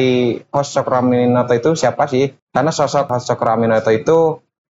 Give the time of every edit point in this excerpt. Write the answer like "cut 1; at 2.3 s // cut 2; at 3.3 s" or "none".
cut 1; at 2.4 s // cut 2; at 3.1 s